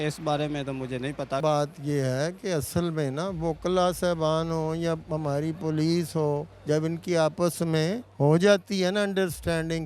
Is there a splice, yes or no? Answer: yes